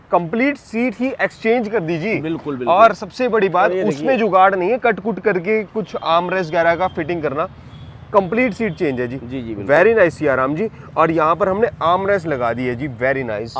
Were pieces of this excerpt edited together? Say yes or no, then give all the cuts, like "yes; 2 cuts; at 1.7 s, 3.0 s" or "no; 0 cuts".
no; 0 cuts